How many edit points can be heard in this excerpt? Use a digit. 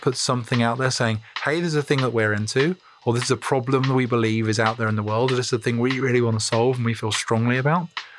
0